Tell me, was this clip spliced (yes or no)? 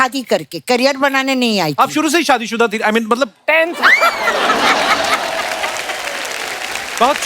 no